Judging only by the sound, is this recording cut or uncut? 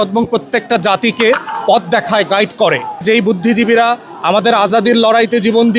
cut